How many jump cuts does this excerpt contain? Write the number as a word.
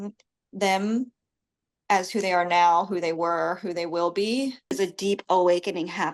one